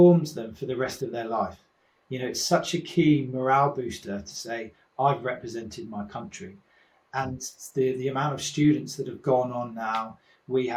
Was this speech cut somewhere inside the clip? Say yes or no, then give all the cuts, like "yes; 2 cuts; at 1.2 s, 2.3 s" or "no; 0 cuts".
no; 0 cuts